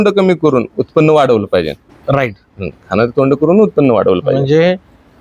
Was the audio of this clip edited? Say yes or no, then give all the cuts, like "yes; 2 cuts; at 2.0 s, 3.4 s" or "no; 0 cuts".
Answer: no; 0 cuts